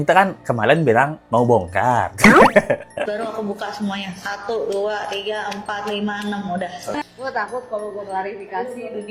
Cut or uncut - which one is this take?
uncut